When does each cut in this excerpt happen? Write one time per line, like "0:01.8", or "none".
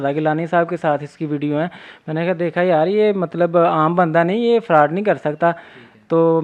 none